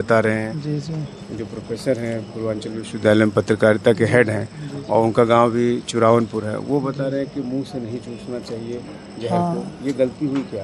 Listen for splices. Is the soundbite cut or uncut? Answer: uncut